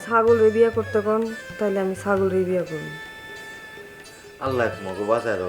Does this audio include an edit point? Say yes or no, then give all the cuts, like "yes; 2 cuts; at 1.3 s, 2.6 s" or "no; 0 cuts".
no; 0 cuts